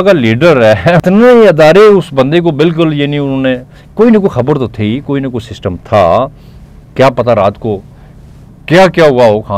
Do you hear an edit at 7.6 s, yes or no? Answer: no